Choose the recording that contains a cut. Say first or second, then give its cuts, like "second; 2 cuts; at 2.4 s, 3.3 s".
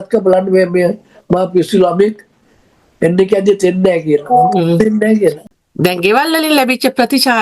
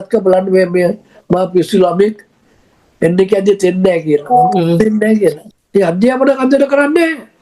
second; 1 cut; at 5.6 s